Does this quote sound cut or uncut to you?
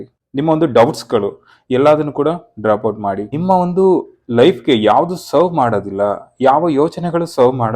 cut